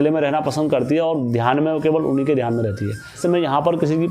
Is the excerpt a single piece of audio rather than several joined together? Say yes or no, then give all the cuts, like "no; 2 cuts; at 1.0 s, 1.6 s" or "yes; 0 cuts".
no; 1 cut; at 3.0 s